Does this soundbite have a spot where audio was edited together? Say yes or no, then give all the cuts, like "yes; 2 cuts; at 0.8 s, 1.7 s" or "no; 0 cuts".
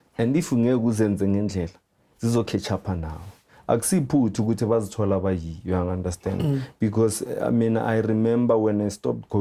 no; 0 cuts